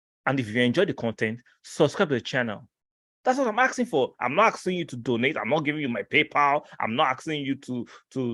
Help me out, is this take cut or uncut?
uncut